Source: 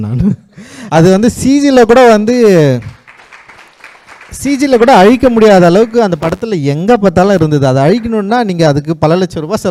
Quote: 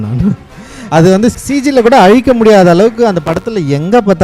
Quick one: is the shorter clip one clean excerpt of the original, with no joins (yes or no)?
no